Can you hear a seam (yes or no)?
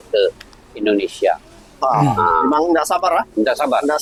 no